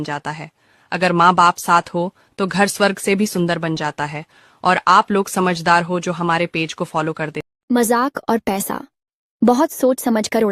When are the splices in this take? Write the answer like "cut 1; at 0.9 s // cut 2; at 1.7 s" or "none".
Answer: cut 1; at 7.4 s